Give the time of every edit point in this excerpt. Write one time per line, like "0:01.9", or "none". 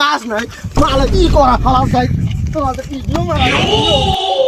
none